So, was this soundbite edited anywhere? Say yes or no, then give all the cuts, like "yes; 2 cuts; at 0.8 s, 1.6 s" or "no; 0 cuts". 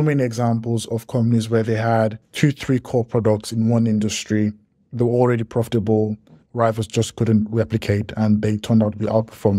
yes; 2 cuts; at 2.2 s, 6.4 s